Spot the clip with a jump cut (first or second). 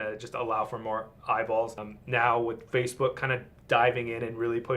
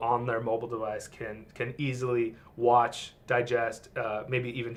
first